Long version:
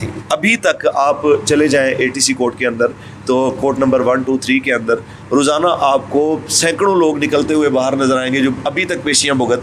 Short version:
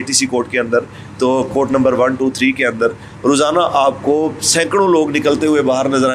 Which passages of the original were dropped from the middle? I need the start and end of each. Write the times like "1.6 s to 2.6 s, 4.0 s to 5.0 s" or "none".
none